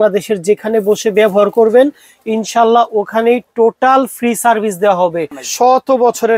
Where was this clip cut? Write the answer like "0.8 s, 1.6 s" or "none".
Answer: 5.4 s